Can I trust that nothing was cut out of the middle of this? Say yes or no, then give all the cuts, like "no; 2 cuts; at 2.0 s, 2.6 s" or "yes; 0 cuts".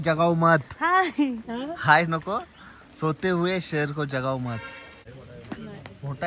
no; 1 cut; at 5.0 s